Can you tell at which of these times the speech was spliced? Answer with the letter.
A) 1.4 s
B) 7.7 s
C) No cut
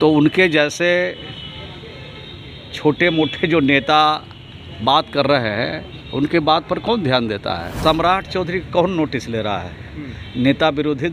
B